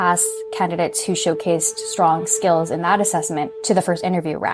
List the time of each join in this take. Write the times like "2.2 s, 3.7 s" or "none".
3.5 s